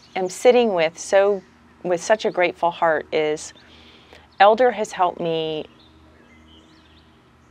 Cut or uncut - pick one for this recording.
uncut